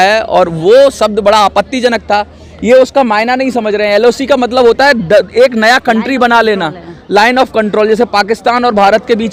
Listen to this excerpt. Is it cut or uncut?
uncut